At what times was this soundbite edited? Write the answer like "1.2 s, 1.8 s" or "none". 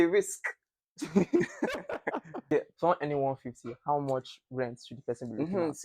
2.4 s